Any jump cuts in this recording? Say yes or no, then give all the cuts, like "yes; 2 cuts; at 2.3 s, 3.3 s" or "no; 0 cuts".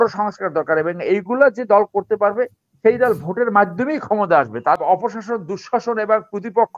yes; 1 cut; at 4.8 s